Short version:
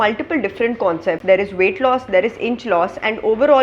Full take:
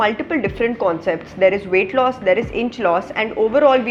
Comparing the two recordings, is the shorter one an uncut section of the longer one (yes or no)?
no